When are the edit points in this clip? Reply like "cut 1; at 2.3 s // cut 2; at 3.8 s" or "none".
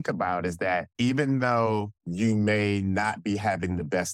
cut 1; at 0.9 s